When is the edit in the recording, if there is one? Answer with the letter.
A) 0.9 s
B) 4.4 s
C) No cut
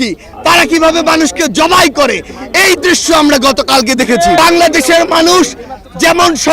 B